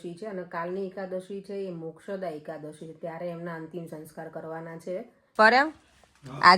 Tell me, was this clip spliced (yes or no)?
yes